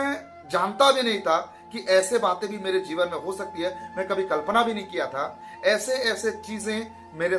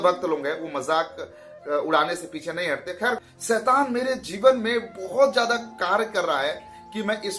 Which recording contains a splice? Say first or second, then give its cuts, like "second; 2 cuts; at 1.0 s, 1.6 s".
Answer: second; 1 cut; at 3.3 s